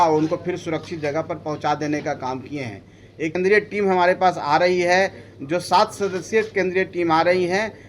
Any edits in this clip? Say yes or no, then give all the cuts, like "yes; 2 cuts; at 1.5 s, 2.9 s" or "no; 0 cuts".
yes; 1 cut; at 3.4 s